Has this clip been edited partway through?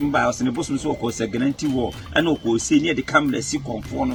no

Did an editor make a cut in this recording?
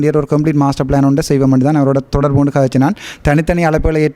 no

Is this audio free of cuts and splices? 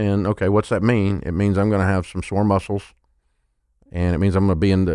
yes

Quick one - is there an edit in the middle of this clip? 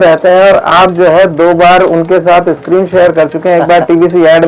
no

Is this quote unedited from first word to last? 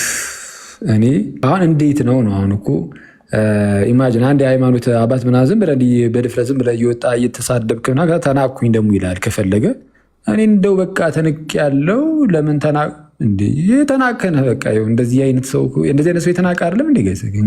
no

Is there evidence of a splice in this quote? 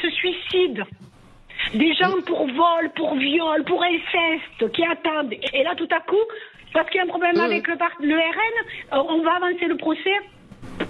yes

